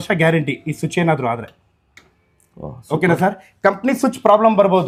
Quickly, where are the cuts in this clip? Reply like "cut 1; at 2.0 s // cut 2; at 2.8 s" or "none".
none